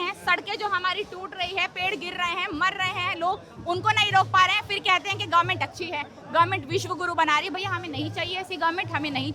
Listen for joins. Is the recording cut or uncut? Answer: uncut